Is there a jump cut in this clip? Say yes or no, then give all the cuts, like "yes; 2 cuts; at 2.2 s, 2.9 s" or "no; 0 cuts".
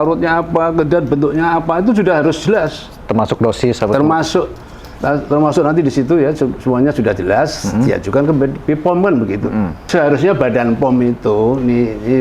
yes; 1 cut; at 9.8 s